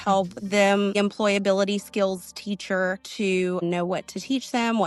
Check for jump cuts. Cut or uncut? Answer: cut